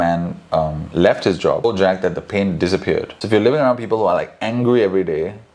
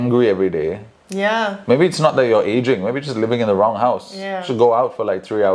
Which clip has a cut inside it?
first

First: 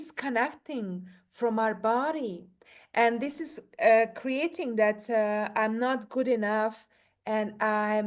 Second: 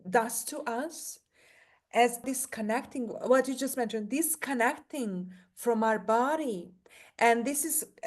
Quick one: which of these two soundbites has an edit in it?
second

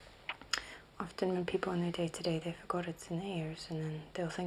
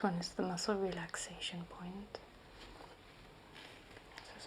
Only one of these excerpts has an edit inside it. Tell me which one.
second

